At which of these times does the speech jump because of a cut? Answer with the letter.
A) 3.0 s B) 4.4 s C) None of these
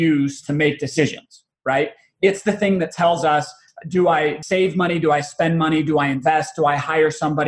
B